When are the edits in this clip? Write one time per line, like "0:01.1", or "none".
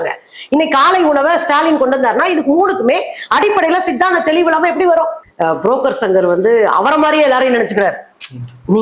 0:05.2